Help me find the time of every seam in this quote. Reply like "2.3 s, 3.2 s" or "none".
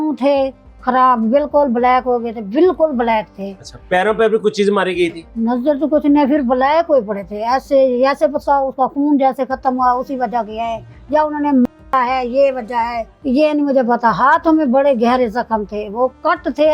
none